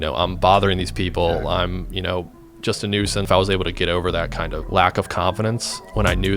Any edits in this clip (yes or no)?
yes